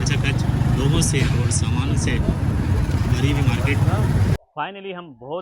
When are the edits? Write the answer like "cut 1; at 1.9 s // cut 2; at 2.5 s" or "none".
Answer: cut 1; at 4.4 s